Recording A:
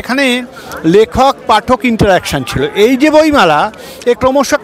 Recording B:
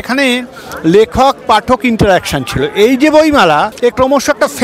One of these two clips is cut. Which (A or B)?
B